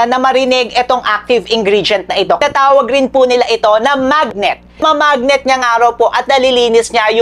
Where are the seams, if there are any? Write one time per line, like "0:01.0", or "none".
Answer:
0:02.4
0:04.8